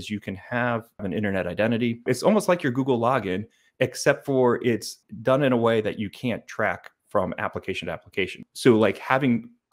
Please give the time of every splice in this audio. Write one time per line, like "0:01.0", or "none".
0:01.0
0:02.0
0:05.0
0:08.4